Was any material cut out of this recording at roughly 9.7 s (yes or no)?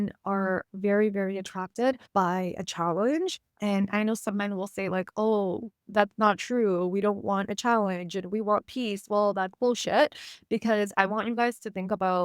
no